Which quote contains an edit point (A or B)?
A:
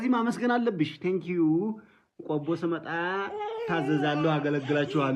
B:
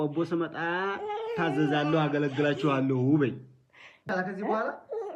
B